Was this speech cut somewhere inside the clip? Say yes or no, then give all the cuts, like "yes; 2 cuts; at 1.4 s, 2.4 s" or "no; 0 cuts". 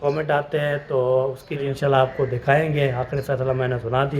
yes; 1 cut; at 1.6 s